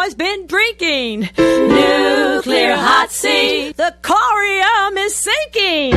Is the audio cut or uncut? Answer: uncut